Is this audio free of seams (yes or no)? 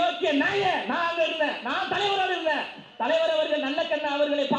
yes